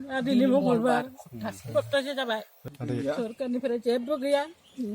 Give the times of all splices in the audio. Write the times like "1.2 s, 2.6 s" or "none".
2.7 s